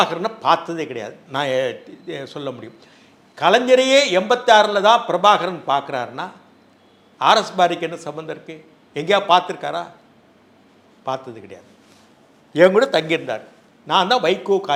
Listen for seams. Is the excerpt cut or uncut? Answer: uncut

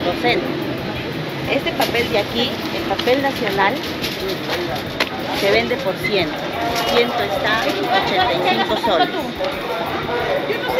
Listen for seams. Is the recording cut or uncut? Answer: uncut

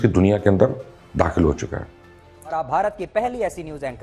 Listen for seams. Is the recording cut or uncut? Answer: cut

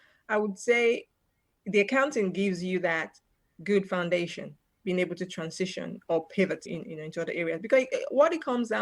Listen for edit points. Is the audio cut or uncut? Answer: uncut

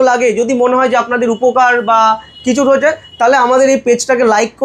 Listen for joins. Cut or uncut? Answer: uncut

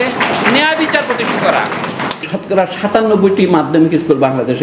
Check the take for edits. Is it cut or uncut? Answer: cut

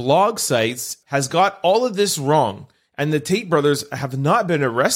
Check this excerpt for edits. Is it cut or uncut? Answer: cut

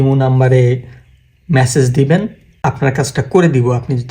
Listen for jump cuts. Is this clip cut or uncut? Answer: cut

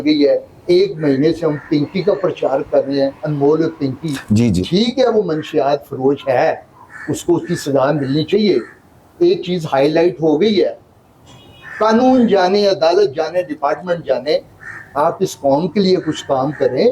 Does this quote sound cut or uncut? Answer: uncut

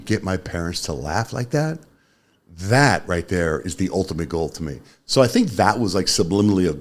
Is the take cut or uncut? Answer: uncut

